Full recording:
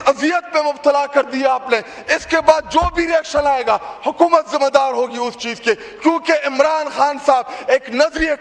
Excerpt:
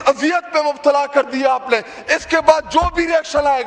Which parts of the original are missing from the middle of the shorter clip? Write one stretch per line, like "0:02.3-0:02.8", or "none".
none